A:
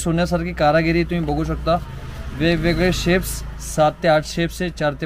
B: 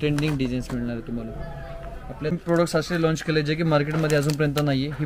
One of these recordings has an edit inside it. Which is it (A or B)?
B